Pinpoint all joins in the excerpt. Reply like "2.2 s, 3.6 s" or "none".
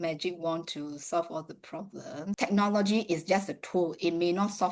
2.3 s